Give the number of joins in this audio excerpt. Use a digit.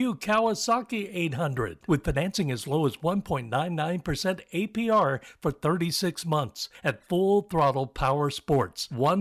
1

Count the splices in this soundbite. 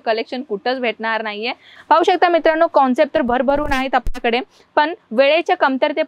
1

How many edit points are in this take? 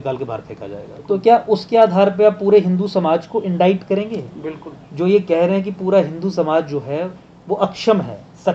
1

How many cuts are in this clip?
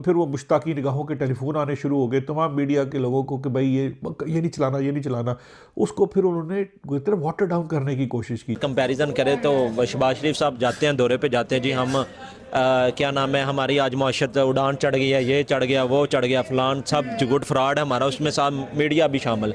1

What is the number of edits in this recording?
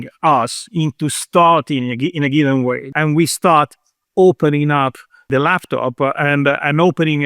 2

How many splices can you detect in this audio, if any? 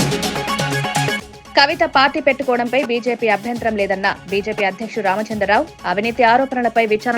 1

